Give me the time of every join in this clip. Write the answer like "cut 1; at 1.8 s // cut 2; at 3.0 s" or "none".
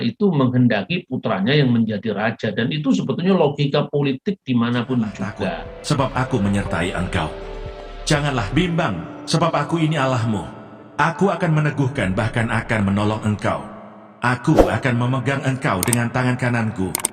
cut 1; at 5.7 s